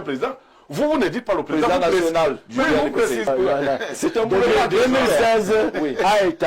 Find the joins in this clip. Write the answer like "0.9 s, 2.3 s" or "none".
3.3 s